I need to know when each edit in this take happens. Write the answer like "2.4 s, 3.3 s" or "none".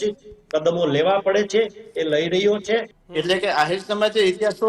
3.0 s